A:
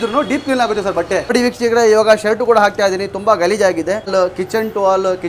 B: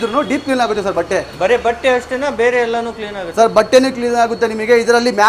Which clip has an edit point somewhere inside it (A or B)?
A